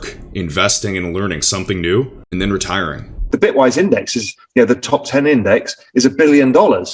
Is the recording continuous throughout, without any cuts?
no; 1 cut; at 3.2 s

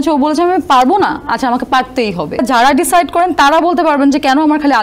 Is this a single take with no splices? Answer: no; 1 cut; at 2.4 s

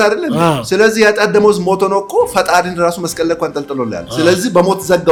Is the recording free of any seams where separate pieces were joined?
yes; 0 cuts

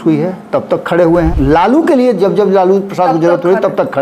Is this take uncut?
no; 1 cut; at 1.3 s

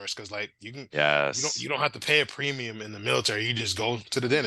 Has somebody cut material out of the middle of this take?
no; 0 cuts

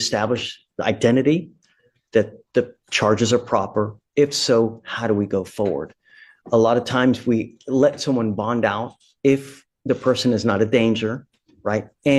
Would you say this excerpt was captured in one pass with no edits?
yes; 0 cuts

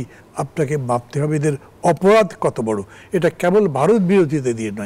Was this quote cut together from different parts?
no; 0 cuts

